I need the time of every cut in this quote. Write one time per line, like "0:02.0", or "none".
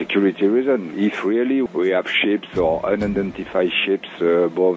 0:01.3